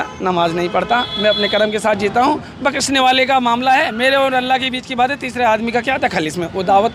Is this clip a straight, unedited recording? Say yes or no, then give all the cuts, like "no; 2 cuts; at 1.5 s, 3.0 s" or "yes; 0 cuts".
yes; 0 cuts